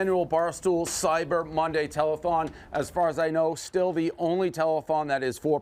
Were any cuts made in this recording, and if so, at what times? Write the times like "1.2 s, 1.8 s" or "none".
none